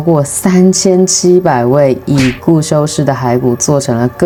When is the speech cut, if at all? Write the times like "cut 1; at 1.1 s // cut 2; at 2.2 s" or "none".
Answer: none